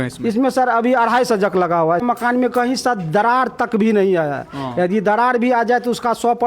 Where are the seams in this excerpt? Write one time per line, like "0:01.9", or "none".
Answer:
0:02.0